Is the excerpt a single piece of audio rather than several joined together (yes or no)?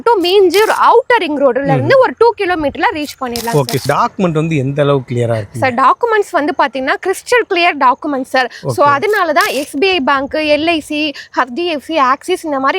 no